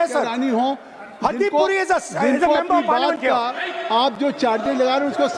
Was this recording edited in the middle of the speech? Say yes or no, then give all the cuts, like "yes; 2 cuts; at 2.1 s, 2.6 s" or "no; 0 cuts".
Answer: no; 0 cuts